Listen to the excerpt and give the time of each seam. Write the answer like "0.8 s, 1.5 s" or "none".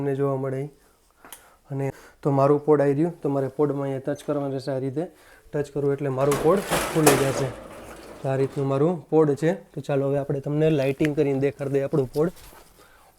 2.0 s